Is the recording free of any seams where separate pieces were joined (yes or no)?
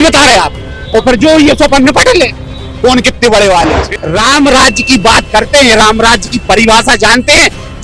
no